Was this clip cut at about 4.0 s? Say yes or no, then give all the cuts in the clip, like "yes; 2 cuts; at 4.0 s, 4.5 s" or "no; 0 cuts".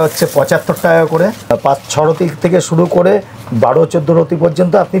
no; 1 cut; at 1.5 s